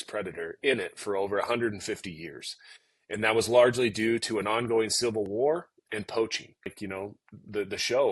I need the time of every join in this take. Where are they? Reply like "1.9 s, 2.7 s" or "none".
6.8 s